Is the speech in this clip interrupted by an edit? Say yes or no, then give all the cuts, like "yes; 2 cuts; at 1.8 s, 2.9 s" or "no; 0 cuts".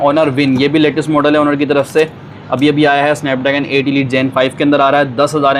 no; 0 cuts